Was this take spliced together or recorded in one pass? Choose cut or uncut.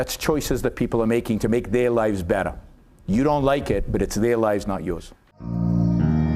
cut